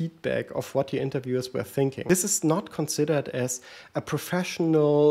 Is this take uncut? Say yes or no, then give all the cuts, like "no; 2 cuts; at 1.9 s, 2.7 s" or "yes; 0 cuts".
no; 1 cut; at 2.0 s